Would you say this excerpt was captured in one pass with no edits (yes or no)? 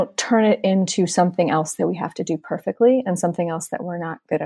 yes